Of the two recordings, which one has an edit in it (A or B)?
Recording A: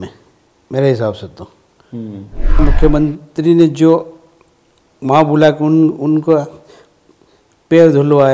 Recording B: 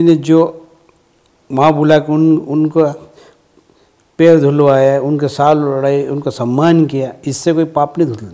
A